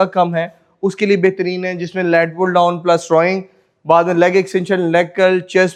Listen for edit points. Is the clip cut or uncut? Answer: uncut